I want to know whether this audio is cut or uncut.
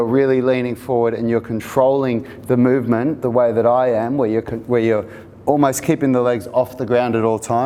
uncut